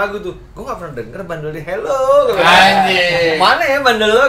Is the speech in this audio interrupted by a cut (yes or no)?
no